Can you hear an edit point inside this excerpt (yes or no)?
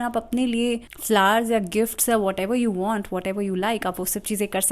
yes